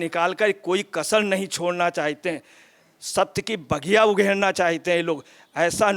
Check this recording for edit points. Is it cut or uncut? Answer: uncut